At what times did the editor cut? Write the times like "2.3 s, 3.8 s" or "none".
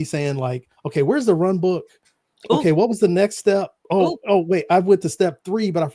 none